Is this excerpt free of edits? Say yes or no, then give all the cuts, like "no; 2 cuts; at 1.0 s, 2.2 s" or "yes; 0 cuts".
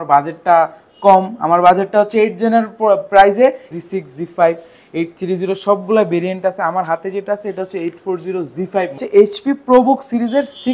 no; 2 cuts; at 3.7 s, 9.0 s